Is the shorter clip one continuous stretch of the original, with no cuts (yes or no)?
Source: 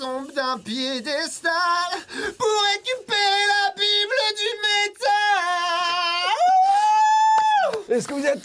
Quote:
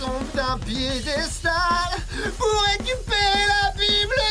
yes